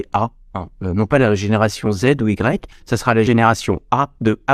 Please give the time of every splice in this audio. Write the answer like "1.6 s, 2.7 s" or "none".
3.3 s